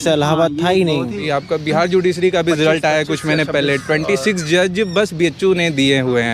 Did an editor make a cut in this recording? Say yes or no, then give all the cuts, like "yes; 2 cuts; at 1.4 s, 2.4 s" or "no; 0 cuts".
yes; 1 cut; at 1.2 s